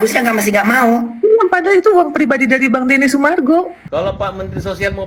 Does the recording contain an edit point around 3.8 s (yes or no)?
yes